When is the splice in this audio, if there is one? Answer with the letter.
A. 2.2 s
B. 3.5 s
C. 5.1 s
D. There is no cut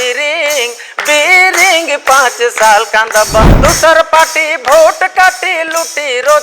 B